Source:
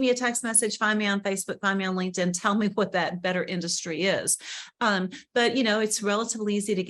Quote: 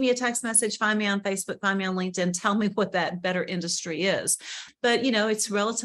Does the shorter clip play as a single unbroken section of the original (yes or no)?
no